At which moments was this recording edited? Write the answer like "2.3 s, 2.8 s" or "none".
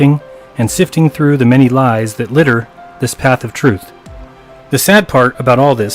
3.6 s